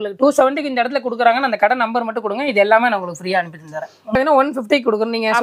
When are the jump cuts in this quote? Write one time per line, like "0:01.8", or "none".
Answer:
0:04.2